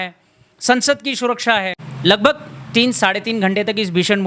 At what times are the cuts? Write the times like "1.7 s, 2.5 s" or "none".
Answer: 1.8 s